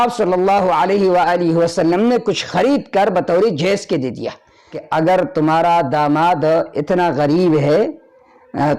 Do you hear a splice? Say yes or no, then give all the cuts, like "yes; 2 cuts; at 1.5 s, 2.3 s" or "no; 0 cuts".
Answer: yes; 1 cut; at 4.8 s